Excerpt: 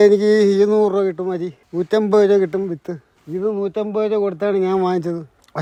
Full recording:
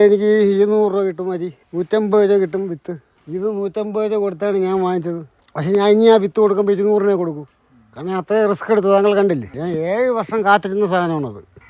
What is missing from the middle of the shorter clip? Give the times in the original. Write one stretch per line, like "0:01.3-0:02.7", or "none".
none